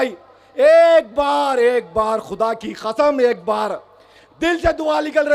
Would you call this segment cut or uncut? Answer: uncut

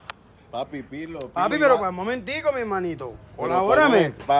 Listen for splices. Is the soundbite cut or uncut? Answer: uncut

